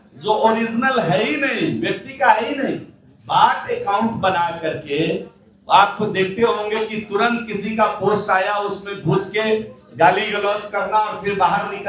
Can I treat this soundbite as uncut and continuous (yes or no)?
yes